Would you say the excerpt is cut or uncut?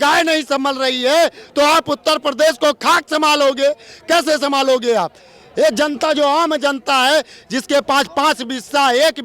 uncut